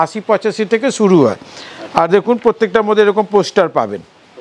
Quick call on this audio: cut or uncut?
uncut